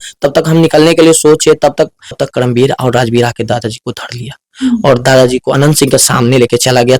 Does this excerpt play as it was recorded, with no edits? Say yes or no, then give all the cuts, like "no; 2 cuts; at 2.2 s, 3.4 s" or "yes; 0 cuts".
no; 1 cut; at 2.1 s